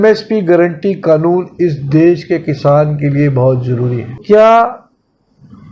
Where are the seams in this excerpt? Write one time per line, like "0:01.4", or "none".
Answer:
0:04.2

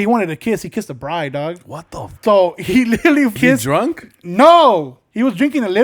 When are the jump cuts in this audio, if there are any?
0:02.2
0:03.3

